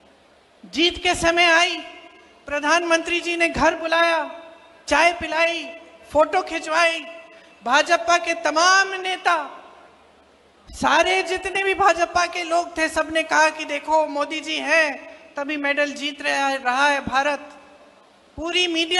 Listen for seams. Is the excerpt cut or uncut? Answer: uncut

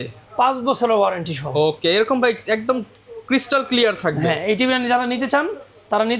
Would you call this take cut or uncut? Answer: uncut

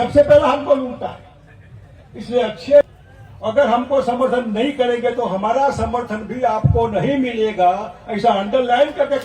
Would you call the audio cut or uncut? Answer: cut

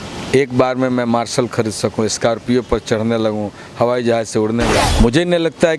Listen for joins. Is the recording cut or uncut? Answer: cut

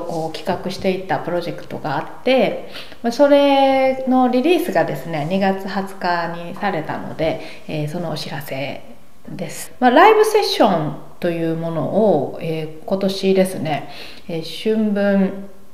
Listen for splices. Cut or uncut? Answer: cut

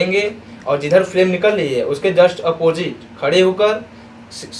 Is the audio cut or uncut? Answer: uncut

